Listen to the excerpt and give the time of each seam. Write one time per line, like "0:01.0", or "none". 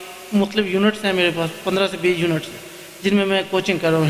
none